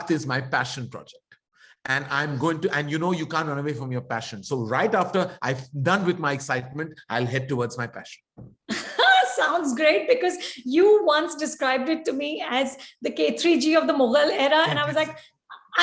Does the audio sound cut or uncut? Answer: uncut